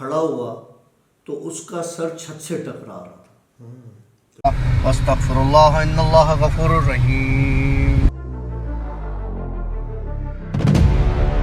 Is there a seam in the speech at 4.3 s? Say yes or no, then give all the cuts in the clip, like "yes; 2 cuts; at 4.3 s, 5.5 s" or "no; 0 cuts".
yes; 1 cut; at 4.3 s